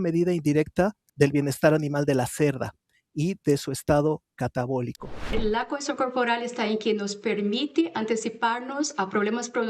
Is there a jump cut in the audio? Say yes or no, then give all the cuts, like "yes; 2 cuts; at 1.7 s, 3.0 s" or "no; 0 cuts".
yes; 2 cuts; at 1.0 s, 5.4 s